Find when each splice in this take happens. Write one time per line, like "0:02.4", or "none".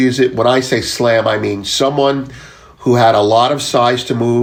none